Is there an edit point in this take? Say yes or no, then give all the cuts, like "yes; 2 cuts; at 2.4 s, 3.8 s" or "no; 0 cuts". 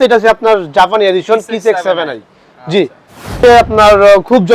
yes; 1 cut; at 3.3 s